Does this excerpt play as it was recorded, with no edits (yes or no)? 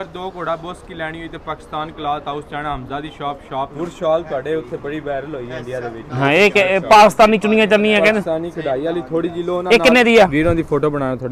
no